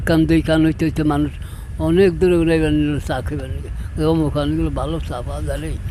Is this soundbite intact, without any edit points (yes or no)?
yes